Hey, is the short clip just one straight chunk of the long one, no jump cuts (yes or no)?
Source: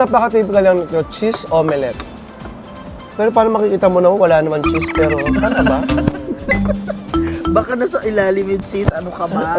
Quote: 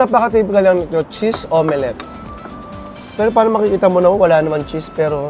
yes